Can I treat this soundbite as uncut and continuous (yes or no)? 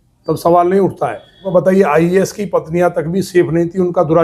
no